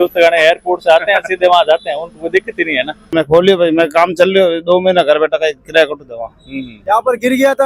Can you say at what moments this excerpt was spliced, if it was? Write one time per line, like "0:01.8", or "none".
0:03.1
0:06.7